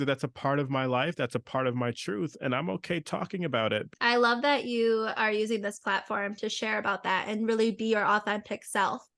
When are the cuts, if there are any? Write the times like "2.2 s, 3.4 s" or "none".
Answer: 3.9 s